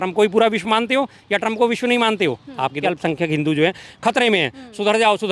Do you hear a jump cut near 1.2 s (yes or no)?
no